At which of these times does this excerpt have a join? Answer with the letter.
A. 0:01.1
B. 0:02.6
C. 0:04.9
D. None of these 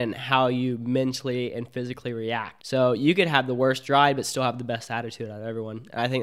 B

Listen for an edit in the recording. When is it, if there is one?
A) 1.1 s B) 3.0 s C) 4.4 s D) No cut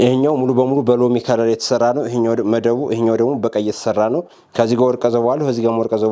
C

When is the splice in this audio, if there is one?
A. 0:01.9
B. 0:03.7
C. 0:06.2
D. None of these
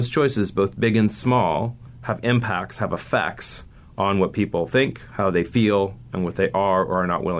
A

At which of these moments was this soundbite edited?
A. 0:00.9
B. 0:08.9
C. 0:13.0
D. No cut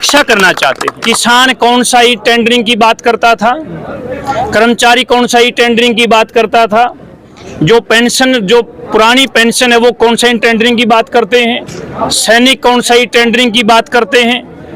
A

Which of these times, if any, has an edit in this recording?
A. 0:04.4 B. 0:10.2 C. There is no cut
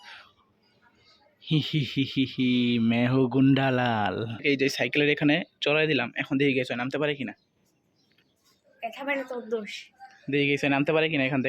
A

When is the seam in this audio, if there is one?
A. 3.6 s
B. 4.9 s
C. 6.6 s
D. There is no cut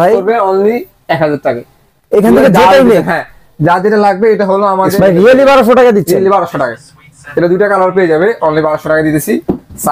B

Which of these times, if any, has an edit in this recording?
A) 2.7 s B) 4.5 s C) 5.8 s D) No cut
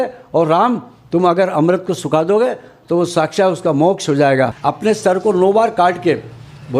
B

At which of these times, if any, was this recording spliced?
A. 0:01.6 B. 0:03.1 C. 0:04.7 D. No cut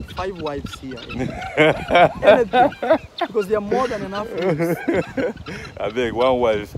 D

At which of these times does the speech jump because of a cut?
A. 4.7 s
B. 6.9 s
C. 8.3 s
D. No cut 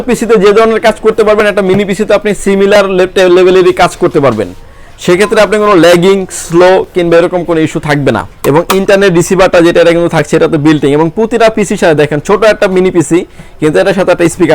C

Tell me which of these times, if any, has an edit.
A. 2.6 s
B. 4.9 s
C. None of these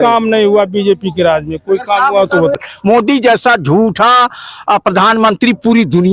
A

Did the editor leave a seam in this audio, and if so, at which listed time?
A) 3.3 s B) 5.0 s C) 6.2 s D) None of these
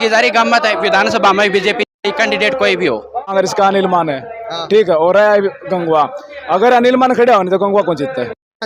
A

